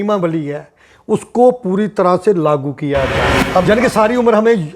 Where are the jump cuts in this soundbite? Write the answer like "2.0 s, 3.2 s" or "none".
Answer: 3.4 s